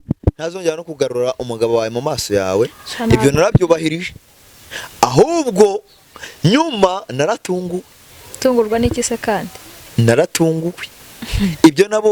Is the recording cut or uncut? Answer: uncut